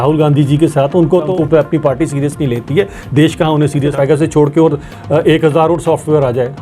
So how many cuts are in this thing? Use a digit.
2